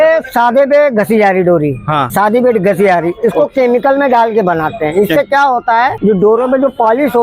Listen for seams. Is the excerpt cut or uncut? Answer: cut